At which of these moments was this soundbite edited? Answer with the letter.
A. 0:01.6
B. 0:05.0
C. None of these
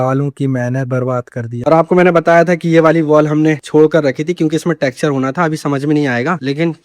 A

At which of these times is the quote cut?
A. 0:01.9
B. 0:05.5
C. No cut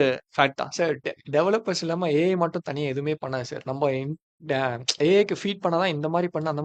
C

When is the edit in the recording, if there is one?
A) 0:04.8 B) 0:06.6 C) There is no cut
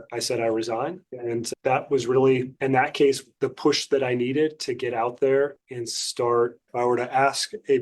B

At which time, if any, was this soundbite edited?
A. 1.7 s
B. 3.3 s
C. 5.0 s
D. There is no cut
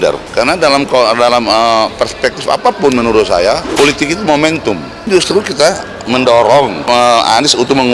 D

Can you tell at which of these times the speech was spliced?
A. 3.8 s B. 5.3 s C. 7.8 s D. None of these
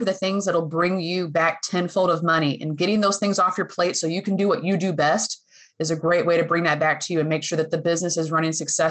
D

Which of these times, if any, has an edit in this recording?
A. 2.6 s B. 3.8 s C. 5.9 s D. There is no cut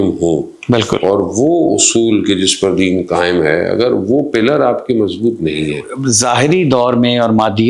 C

